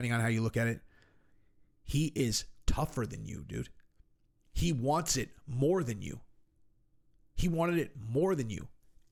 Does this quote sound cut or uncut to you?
uncut